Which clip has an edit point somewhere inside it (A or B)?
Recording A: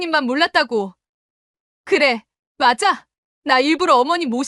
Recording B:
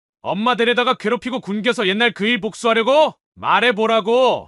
B